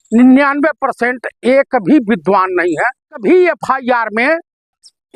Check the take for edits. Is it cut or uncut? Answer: cut